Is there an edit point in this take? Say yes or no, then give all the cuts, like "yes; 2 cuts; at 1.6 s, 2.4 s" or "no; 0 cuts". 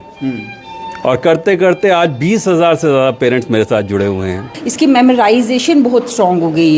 yes; 1 cut; at 4.6 s